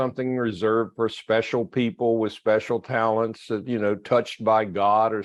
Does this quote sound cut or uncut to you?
uncut